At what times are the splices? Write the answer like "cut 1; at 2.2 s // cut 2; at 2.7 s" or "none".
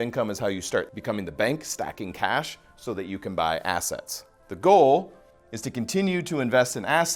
cut 1; at 0.9 s